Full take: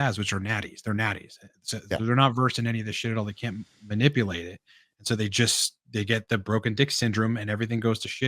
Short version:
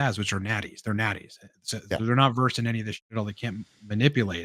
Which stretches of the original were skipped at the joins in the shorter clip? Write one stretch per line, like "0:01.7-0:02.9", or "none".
none